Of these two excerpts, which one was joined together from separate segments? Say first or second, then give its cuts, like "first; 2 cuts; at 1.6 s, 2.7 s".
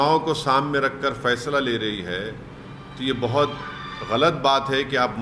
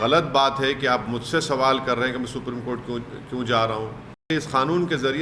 second; 1 cut; at 4.3 s